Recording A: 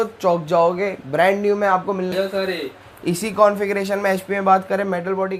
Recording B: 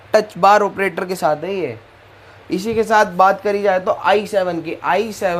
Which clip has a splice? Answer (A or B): A